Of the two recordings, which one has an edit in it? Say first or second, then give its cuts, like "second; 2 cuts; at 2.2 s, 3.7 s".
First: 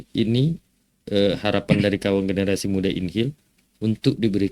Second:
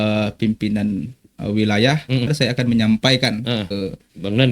second; 2 cuts; at 2.3 s, 3.7 s